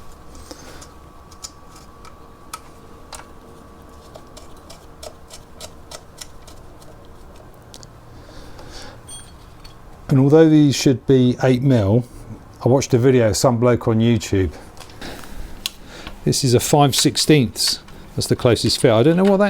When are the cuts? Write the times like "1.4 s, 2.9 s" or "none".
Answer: 15.0 s